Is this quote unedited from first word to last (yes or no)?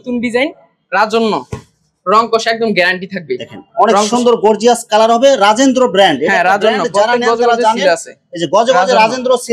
yes